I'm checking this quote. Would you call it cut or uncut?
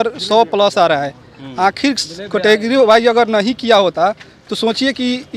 uncut